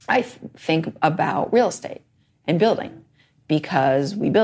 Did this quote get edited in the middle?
no; 0 cuts

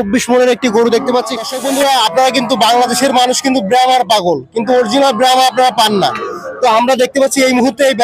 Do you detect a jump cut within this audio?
yes; 1 cut; at 1.5 s

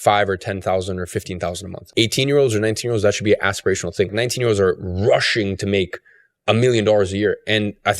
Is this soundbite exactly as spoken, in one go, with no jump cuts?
no; 2 cuts; at 1.8 s, 4.1 s

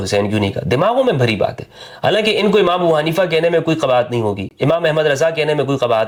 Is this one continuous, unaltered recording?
yes; 0 cuts

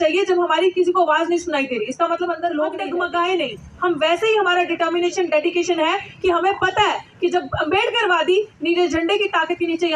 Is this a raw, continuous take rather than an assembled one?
no; 1 cut; at 2.8 s

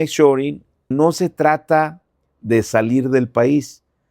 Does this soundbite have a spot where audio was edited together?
yes; 1 cut; at 0.9 s

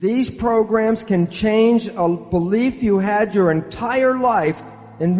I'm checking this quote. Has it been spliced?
no; 0 cuts

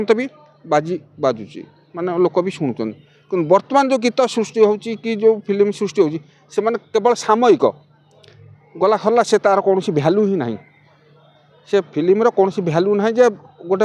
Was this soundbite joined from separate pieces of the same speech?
no; 0 cuts

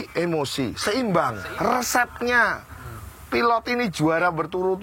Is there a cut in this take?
yes; 1 cut; at 1.4 s

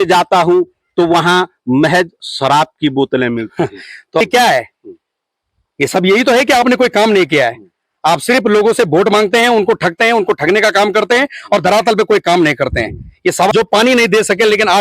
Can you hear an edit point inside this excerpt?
yes; 2 cuts; at 4.2 s, 13.5 s

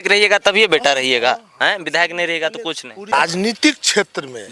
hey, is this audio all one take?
no; 1 cut; at 3.1 s

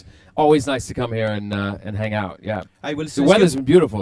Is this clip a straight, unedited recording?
no; 1 cut; at 1.4 s

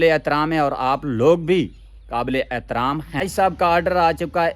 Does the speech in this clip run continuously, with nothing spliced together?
no; 1 cut; at 3.2 s

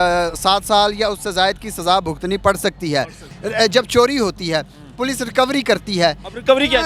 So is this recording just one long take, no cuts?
no; 1 cut; at 3.2 s

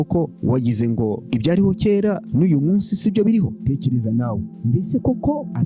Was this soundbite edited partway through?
yes; 1 cut; at 3.5 s

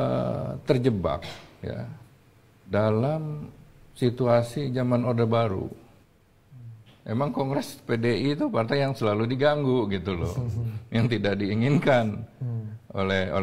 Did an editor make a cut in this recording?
no; 0 cuts

